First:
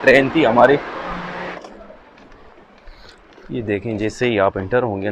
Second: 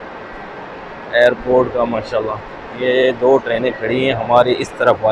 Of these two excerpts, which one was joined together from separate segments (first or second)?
first